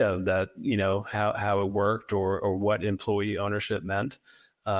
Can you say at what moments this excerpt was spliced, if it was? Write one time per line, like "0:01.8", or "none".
none